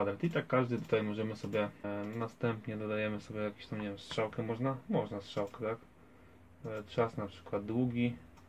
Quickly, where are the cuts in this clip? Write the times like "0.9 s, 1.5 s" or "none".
1.8 s